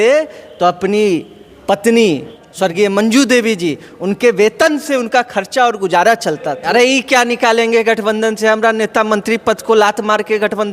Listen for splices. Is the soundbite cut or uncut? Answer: cut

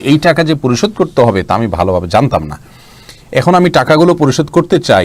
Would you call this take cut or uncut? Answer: uncut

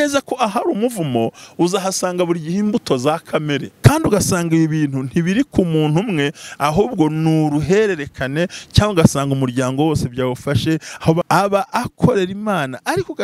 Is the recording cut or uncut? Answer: cut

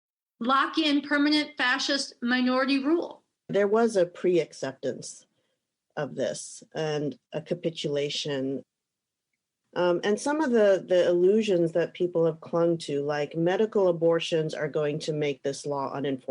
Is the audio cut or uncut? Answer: cut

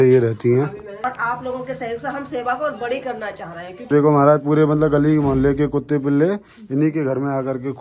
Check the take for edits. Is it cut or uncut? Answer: cut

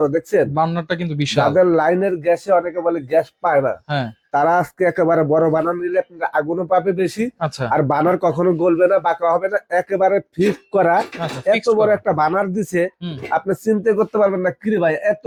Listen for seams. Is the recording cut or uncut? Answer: uncut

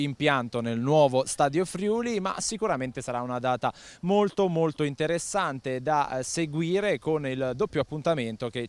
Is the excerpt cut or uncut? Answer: cut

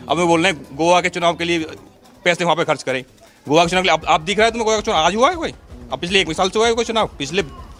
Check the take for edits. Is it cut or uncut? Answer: uncut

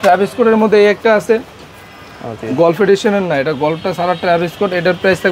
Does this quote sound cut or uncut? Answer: uncut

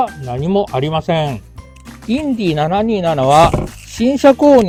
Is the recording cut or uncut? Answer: uncut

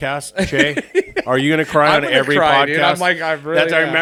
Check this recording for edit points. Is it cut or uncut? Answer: uncut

